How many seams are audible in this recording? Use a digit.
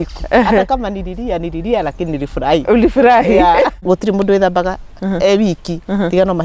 1